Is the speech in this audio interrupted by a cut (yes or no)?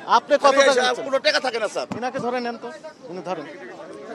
no